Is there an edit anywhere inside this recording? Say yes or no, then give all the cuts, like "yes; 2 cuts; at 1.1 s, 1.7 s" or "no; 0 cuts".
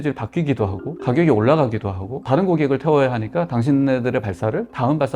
no; 0 cuts